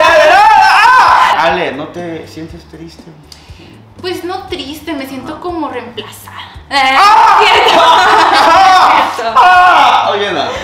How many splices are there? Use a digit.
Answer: 1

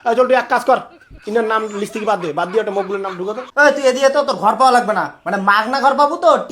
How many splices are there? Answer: 1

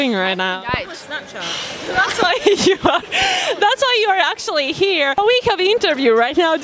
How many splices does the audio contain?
1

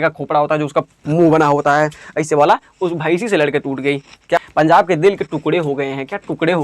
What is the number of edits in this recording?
1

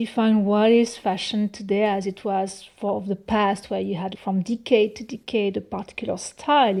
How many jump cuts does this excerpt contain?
0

